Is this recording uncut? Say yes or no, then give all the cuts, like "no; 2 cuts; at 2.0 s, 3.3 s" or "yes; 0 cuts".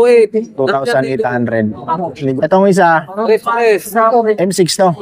no; 1 cut; at 2.3 s